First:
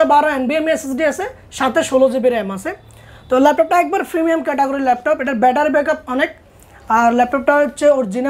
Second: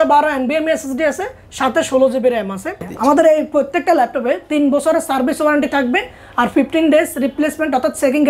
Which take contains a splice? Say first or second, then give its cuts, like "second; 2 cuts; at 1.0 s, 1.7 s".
second; 1 cut; at 2.8 s